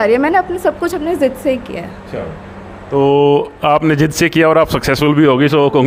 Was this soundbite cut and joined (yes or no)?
no